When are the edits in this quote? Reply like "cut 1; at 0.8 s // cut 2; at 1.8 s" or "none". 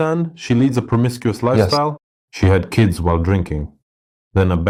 none